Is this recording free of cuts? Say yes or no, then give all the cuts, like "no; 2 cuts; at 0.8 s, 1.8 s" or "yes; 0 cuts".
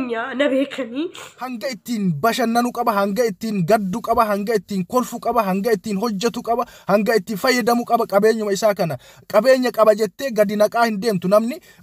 no; 1 cut; at 1.7 s